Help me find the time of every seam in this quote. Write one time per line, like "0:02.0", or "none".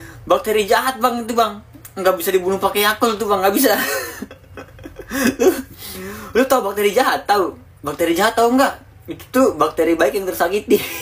0:03.9